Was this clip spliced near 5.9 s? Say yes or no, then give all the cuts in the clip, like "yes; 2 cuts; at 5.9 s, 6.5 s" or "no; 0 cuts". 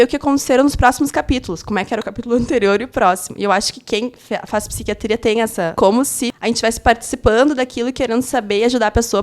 yes; 1 cut; at 5.9 s